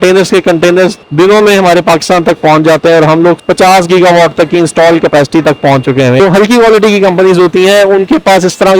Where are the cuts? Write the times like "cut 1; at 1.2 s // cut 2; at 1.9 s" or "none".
cut 1; at 3.4 s // cut 2; at 6.2 s